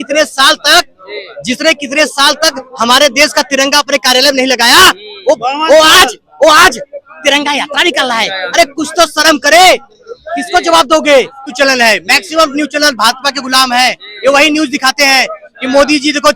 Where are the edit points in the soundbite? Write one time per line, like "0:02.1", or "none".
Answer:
0:11.5